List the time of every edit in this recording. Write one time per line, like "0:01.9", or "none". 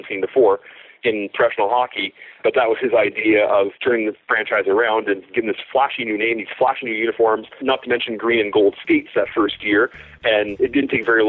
0:02.4
0:03.7
0:07.6
0:10.5